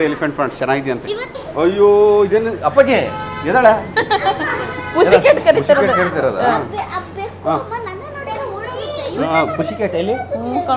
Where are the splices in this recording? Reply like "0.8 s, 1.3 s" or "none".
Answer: none

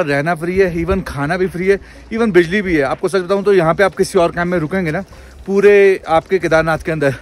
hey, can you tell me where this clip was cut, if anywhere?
none

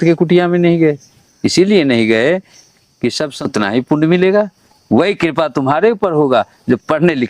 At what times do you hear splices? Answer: 3.4 s

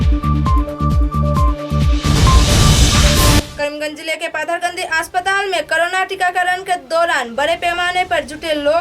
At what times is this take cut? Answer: 3.4 s

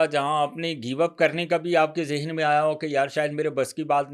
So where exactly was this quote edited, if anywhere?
none

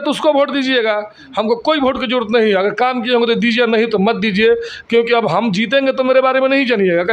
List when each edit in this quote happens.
none

